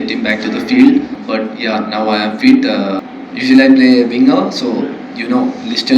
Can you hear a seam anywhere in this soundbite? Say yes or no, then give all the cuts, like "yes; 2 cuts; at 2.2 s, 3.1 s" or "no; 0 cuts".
yes; 2 cuts; at 1.2 s, 3.1 s